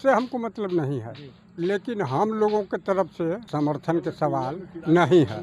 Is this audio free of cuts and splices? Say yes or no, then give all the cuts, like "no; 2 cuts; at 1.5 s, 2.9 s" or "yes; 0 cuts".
no; 1 cut; at 3.4 s